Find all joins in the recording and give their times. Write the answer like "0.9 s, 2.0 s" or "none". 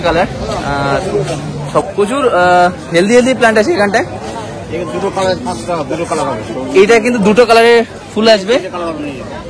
1.9 s